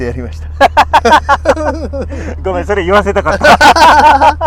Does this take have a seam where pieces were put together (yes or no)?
no